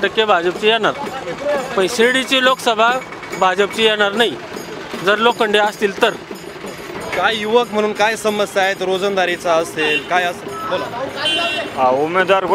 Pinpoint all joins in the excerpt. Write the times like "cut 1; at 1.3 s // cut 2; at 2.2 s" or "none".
none